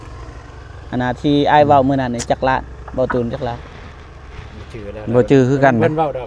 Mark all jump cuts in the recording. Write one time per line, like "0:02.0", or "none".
none